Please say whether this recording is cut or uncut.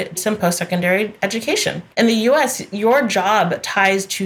cut